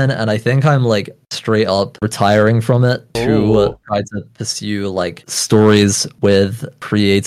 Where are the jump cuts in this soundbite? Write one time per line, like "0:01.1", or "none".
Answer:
none

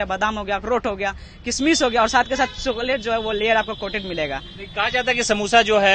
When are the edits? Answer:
none

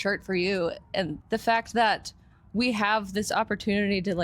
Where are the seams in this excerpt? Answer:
0:01.1

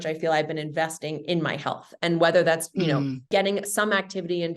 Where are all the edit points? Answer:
0:03.3

